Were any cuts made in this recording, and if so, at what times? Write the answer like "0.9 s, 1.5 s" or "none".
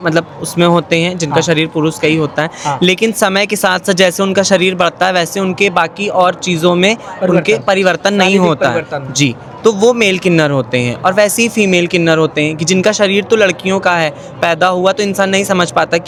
none